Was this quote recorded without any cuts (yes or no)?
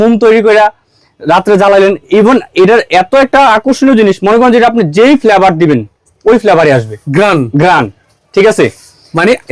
yes